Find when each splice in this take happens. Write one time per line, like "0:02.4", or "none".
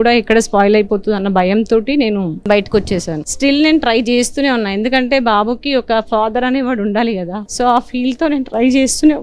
0:02.4
0:03.3
0:07.4